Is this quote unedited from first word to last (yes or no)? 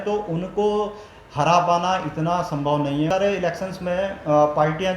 no